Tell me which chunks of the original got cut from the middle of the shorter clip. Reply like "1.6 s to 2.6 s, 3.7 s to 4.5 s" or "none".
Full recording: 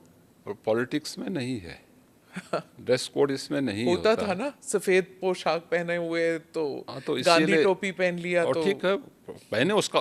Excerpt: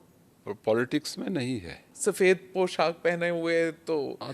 1.9 s to 4.6 s

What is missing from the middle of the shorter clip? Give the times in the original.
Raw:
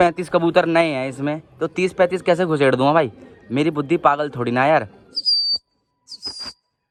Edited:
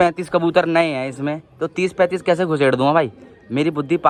none

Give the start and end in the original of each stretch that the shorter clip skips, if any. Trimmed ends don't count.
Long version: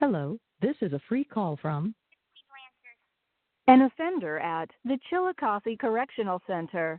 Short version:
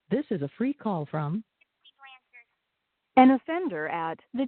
none

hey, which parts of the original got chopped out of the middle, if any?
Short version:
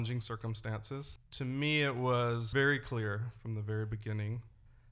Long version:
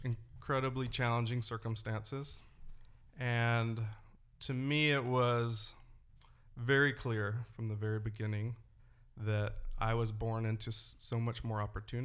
2.4 s to 4.3 s, 5.5 s to 6.6 s

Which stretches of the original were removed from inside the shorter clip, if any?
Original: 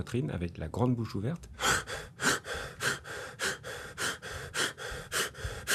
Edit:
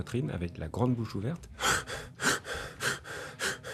none

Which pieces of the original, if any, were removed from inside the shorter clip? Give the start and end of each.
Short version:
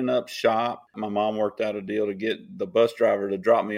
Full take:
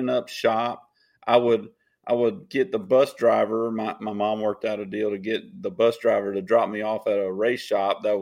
0.9 s to 4.0 s

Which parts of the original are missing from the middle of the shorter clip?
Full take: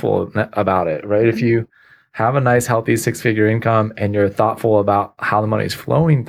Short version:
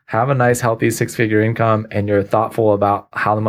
none

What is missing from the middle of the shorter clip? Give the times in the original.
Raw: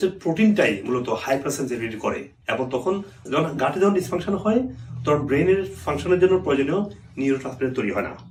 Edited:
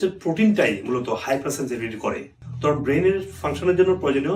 2.4 s to 4.8 s

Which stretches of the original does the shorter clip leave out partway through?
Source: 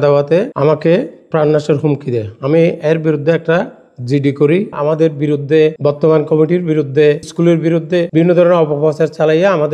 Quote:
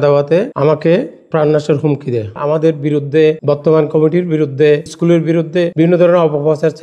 2.3 s to 4.7 s

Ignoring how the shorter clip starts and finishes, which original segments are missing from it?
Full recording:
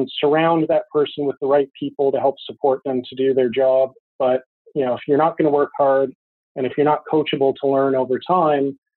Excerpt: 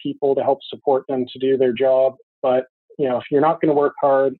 none

